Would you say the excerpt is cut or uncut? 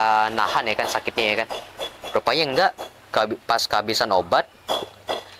uncut